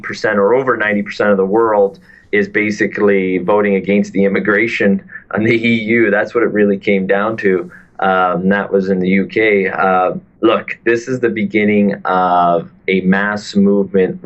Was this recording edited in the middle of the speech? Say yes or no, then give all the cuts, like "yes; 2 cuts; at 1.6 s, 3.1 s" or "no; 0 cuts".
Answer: yes; 1 cut; at 2.7 s